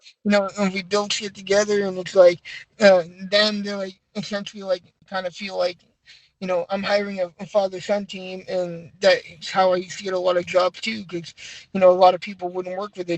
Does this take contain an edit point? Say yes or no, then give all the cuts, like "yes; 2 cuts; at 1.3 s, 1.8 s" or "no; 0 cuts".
yes; 1 cut; at 5.1 s